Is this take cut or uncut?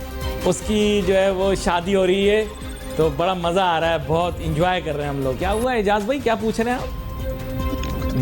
cut